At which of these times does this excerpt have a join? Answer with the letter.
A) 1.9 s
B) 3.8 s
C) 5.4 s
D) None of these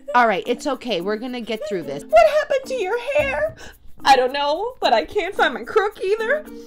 A